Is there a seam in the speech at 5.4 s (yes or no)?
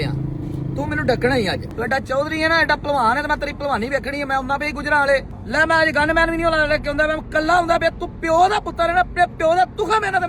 yes